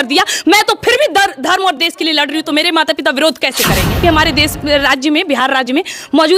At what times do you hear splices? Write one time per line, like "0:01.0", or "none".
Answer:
0:04.0